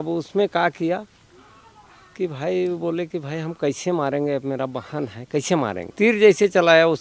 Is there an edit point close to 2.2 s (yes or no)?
no